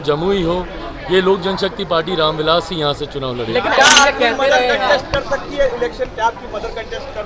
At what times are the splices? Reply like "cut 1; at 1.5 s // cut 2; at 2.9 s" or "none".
cut 1; at 3.8 s